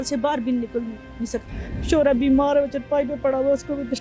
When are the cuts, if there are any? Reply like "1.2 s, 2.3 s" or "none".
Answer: 1.4 s